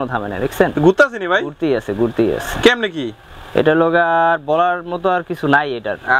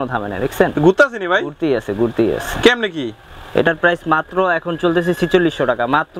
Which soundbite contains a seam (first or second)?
second